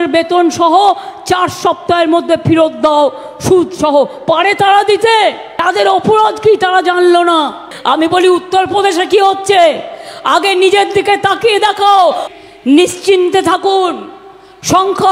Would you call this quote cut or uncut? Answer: cut